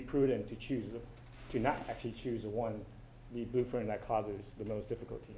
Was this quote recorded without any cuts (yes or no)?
yes